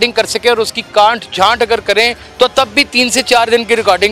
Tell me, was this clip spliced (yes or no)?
yes